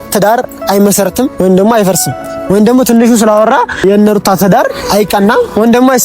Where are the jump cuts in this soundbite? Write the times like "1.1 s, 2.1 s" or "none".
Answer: 4.1 s